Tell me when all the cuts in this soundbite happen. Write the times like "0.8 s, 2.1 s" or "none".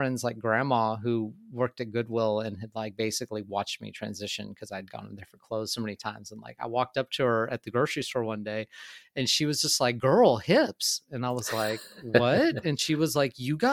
none